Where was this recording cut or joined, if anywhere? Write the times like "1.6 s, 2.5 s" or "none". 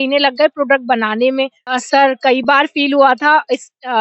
1.6 s

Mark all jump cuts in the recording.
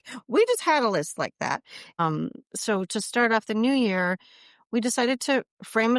2.0 s

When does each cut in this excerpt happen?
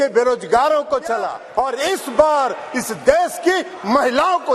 1.4 s

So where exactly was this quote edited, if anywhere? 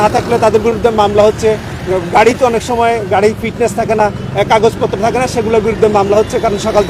none

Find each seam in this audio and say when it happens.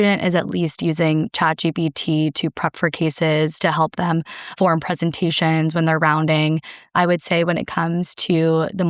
4.5 s, 6.9 s

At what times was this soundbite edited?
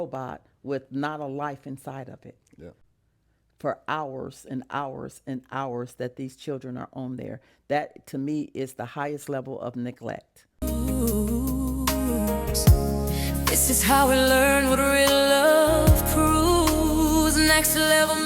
2.8 s, 10.9 s

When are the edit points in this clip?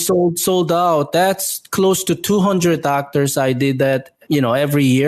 4.1 s

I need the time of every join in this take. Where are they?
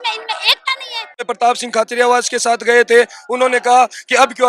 1.2 s

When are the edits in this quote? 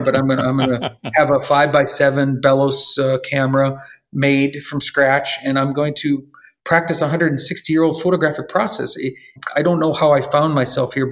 none

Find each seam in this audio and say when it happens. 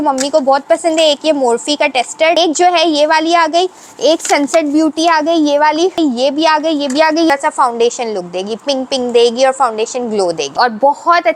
2.4 s, 6.0 s, 7.3 s, 10.5 s

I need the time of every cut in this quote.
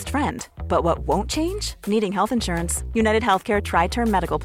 none

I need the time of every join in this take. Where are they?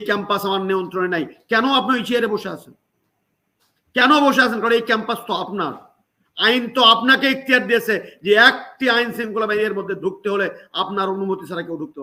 none

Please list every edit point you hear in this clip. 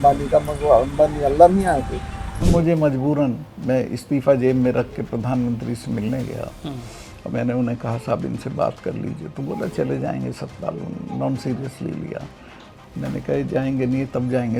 2.5 s

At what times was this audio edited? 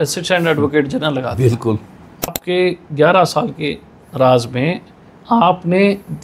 2.4 s

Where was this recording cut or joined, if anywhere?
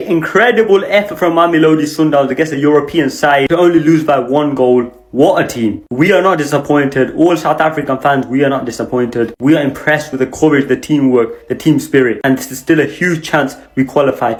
none

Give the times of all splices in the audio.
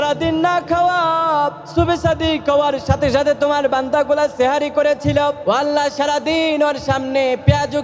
none

